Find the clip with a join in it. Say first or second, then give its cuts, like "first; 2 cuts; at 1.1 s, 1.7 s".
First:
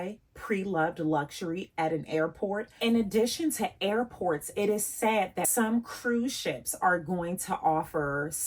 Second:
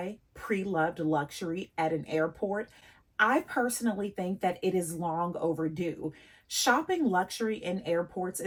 first; 2 cuts; at 2.7 s, 5.5 s